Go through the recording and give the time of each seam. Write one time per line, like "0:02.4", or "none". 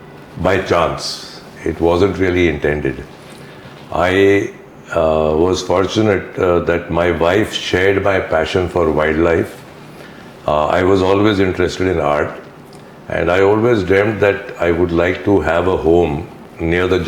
none